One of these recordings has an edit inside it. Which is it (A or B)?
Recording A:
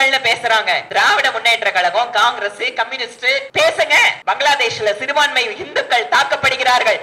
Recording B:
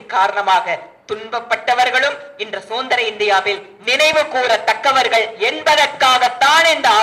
A